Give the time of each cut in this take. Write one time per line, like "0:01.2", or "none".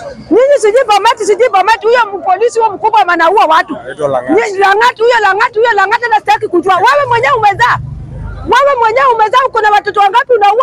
none